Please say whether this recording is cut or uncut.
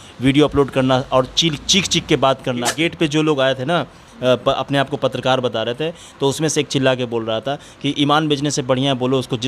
cut